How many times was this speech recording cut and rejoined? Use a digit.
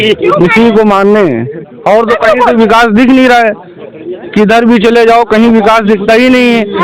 0